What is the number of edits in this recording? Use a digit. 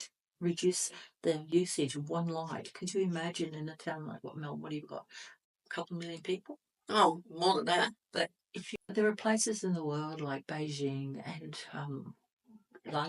1